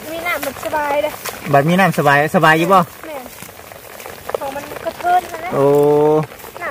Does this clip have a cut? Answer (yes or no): no